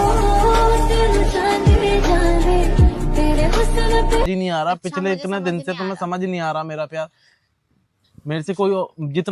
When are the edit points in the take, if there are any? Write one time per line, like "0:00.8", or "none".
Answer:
none

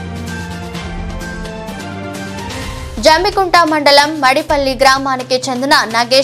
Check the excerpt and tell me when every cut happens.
0:01.3

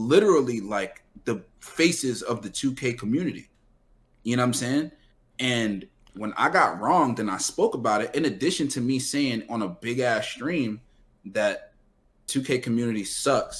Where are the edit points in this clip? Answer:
0:12.3

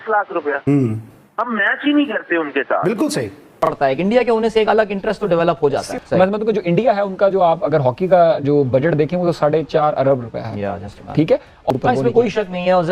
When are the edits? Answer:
0:03.6
0:11.7

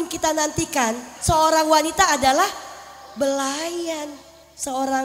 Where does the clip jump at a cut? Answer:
0:01.1

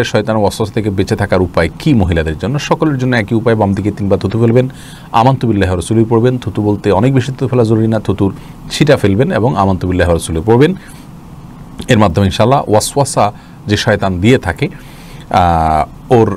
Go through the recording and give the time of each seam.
none

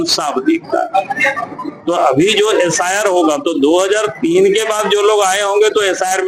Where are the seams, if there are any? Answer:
none

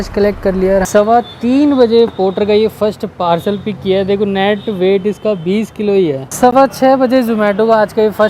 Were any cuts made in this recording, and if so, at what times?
0:00.9
0:06.3

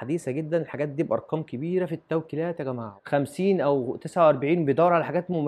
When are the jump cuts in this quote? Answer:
0:02.9

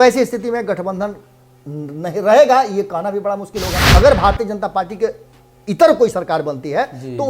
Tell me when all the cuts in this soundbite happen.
0:03.8

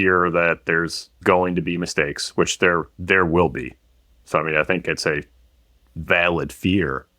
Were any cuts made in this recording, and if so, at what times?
none

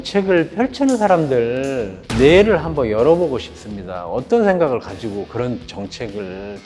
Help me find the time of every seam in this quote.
none

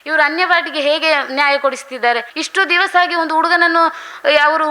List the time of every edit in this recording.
0:02.3

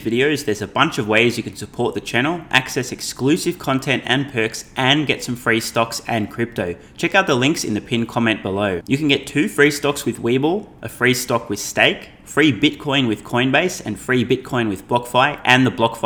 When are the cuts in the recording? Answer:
none

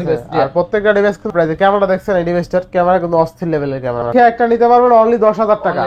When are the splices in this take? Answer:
0:01.3
0:04.1

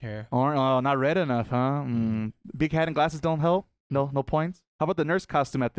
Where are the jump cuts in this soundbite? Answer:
0:04.6

